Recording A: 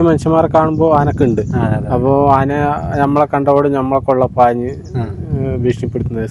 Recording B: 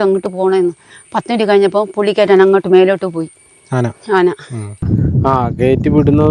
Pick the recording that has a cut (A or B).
B